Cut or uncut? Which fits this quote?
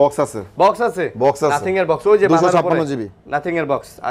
uncut